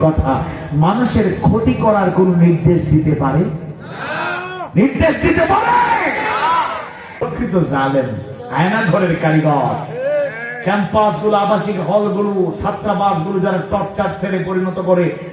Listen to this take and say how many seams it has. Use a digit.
1